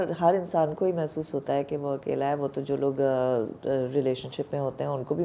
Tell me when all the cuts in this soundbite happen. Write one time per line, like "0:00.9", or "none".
none